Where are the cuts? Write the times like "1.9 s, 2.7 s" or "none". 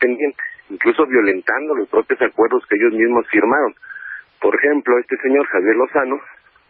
1.5 s